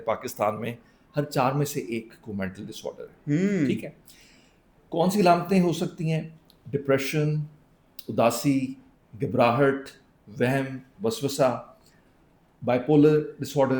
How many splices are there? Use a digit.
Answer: 0